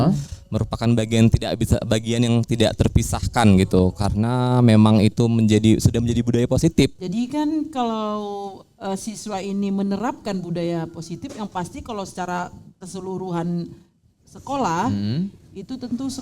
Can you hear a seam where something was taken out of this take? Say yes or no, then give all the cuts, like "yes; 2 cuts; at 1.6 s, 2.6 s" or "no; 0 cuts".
yes; 1 cut; at 7.0 s